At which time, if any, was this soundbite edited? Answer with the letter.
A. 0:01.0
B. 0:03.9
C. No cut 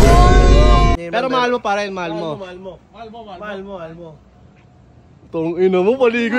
A